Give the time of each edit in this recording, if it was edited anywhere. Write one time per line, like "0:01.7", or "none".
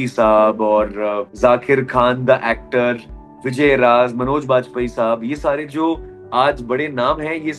0:01.2